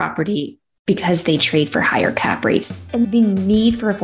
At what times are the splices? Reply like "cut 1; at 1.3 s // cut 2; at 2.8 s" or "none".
cut 1; at 3.1 s